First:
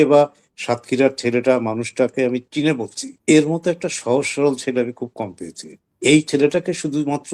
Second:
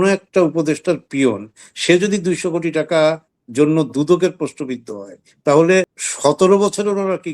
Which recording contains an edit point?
second; 1 cut; at 6.0 s

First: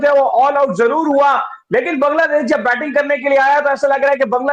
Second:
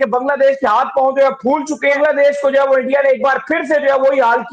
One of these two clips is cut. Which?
second; 1 cut; at 2.0 s

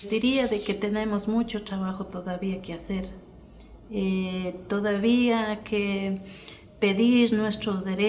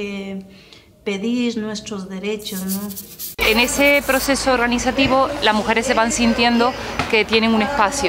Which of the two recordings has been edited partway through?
second; 1 cut; at 3.4 s

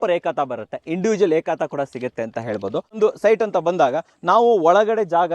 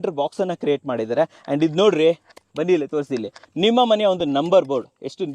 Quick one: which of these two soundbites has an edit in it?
first; 1 cut; at 3.0 s

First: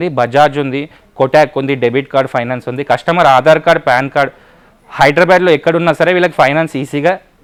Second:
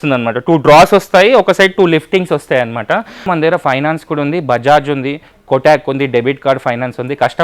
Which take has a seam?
second; 1 cut; at 3.3 s

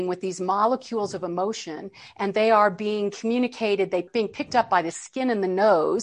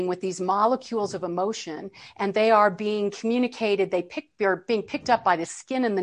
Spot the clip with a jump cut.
first; 1 cut; at 4.1 s

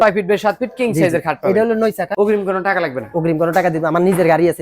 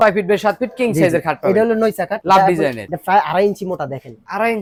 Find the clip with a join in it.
first; 1 cut; at 2.1 s

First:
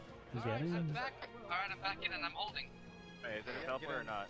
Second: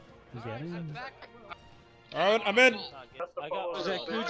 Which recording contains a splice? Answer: second; 2 cuts; at 1.5 s, 3.2 s

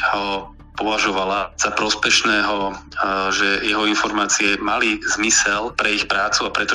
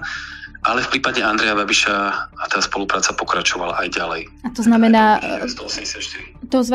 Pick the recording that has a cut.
first; 2 cuts; at 1.5 s, 5.8 s

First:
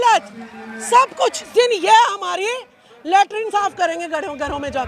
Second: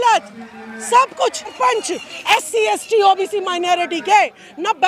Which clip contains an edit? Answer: first; 1 cut; at 1.5 s

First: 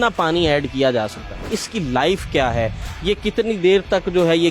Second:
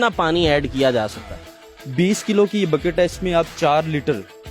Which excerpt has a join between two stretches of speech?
first; 1 cut; at 1.6 s

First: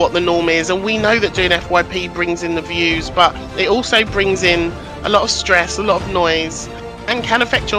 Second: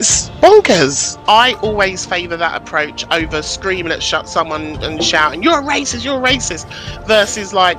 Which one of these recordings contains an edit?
second; 1 cut; at 5.1 s

